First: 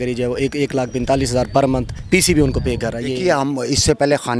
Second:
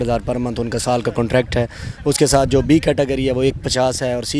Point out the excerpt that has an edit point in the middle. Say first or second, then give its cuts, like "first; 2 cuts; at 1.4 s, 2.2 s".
first; 2 cuts; at 1.9 s, 3.0 s